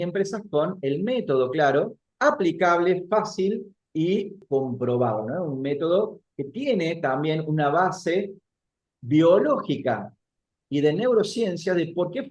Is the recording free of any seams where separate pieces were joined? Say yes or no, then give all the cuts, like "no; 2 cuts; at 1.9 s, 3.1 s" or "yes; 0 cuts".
yes; 0 cuts